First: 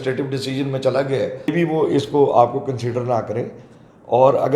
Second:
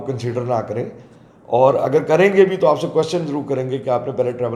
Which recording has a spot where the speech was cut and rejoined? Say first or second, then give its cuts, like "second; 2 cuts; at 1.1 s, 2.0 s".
first; 1 cut; at 1.5 s